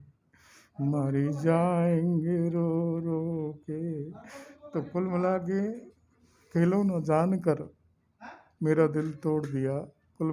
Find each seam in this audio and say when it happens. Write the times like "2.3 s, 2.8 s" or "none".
none